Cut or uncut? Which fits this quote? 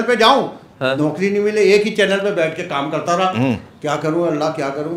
uncut